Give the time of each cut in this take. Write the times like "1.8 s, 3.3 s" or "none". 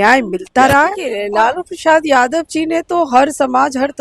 1.1 s